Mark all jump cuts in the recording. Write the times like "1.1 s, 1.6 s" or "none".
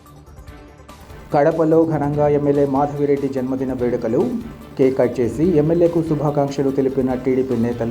1.0 s